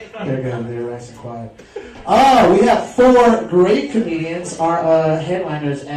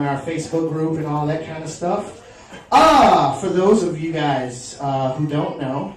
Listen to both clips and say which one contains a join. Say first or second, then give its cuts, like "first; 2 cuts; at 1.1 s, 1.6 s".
second; 1 cut; at 1.3 s